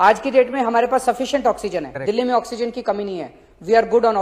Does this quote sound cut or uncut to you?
cut